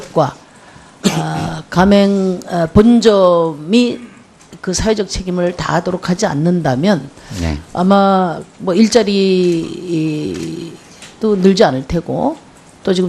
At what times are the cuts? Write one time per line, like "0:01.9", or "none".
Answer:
0:10.8